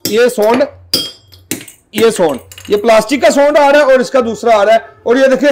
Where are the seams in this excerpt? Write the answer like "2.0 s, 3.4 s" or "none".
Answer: none